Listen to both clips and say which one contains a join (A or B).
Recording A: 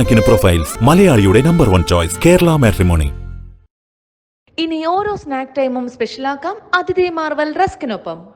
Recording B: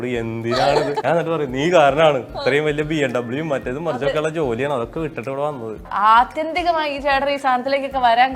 B